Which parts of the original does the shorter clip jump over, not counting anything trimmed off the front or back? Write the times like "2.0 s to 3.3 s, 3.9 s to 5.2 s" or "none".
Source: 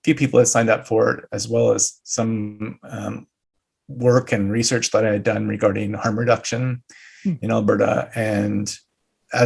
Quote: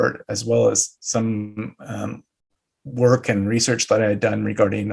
none